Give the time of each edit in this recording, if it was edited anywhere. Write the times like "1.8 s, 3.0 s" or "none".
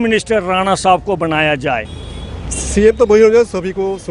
2.0 s